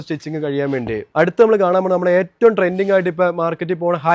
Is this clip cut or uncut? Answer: uncut